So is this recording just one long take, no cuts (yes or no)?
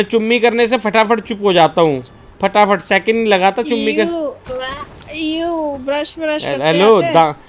yes